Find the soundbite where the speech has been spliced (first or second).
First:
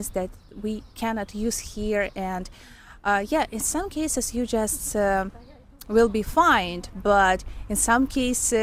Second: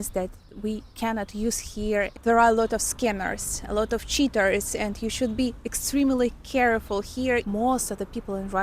second